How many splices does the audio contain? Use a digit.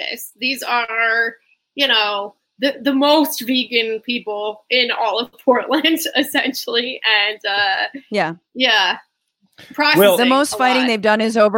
0